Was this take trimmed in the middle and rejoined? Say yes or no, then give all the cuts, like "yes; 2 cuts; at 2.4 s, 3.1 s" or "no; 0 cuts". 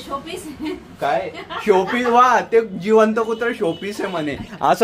no; 0 cuts